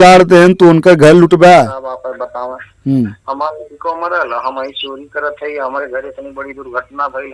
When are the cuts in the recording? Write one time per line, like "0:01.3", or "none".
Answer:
0:01.8